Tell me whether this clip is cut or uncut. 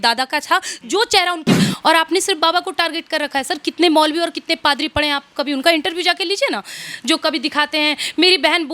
cut